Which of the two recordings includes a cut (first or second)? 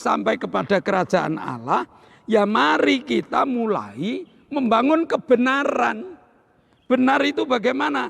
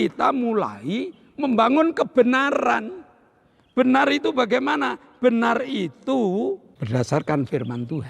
second